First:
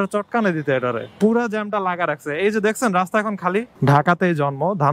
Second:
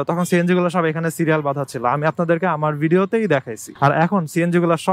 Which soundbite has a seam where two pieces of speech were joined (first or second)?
first